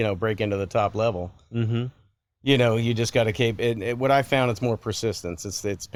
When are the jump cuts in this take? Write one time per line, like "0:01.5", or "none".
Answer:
none